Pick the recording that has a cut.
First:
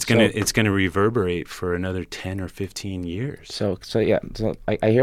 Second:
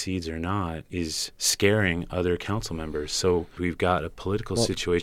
second; 2 cuts; at 1.0 s, 3.5 s

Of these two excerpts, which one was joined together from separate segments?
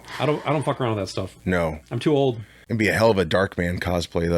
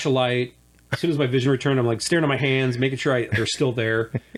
first; 1 cut; at 2.6 s

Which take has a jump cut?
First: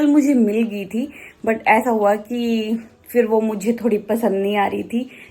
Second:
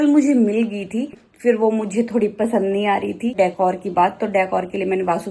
second; 2 cuts; at 1.2 s, 3.3 s

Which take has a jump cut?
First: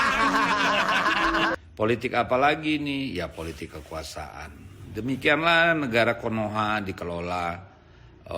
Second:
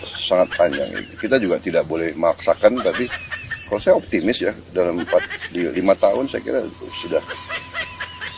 first; 1 cut; at 1.5 s

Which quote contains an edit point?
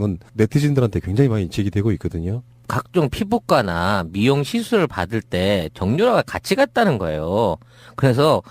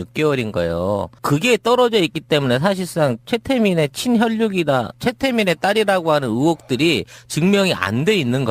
first; 1 cut; at 2.0 s

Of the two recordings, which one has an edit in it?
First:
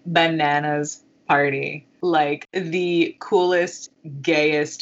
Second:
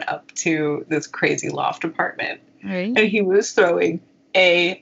first; 2 cuts; at 1.8 s, 2.4 s

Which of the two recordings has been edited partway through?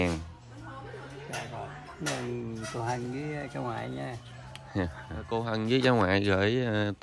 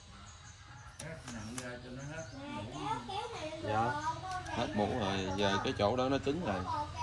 first; 1 cut; at 5.3 s

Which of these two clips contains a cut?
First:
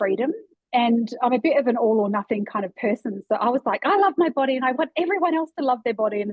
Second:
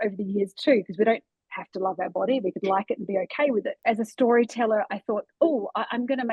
second; 1 cut; at 3.7 s

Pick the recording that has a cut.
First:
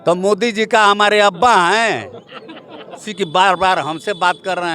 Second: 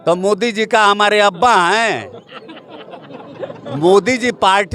first; 1 cut; at 3.1 s

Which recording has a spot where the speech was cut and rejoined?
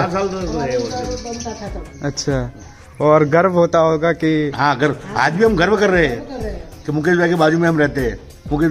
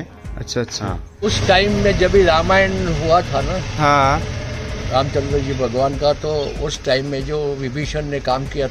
second; 1 cut; at 1.3 s

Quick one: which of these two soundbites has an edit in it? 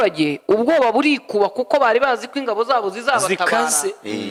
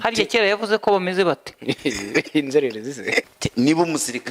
second; 2 cuts; at 1.5 s, 3.2 s

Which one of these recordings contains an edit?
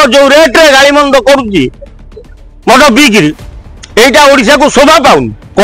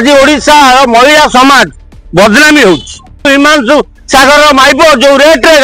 second; 1 cut; at 3.3 s

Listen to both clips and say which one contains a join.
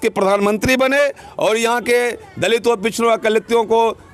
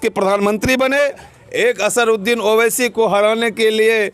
second; 1 cut; at 1.3 s

